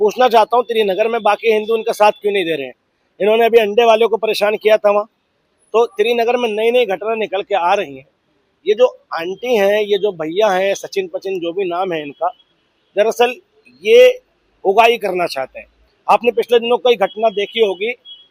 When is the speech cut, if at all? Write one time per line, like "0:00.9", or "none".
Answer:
none